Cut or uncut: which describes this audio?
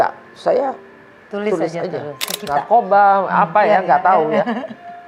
cut